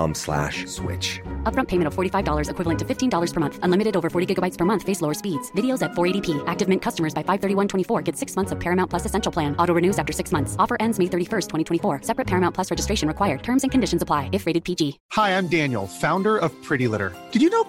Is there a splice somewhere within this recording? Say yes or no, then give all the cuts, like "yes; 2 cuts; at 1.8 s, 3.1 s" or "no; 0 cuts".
yes; 1 cut; at 15.0 s